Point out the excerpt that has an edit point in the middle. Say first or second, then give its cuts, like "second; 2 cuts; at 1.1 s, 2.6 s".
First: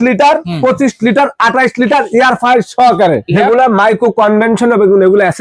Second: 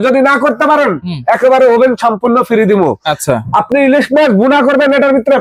first; 1 cut; at 3.3 s